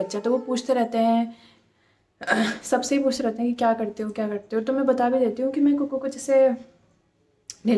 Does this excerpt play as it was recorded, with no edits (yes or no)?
yes